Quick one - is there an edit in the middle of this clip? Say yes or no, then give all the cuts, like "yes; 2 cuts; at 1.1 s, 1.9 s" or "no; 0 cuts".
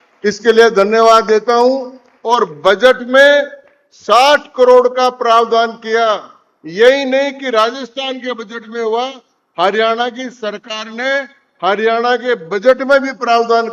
no; 0 cuts